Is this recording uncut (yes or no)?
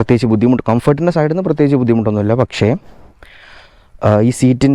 yes